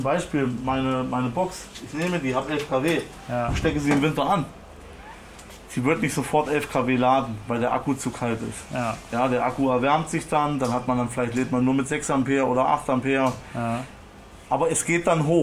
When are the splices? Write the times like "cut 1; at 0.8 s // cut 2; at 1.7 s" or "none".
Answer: none